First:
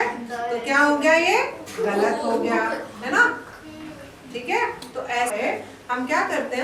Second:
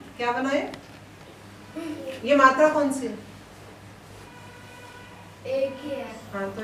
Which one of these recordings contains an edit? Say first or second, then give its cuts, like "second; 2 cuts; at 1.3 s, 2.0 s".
first; 1 cut; at 5.3 s